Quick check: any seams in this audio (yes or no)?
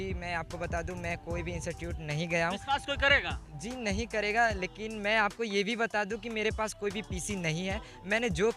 no